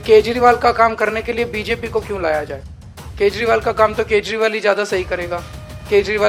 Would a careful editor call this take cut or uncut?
uncut